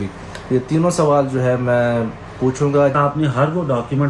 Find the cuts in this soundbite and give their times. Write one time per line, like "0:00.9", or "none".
0:03.0